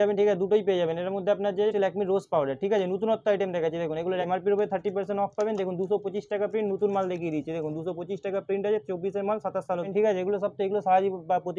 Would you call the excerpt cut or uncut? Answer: cut